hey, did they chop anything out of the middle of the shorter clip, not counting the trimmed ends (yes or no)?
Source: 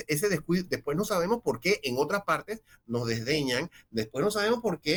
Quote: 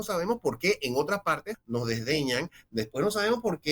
yes